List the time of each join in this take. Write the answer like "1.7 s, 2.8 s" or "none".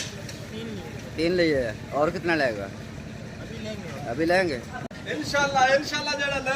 4.7 s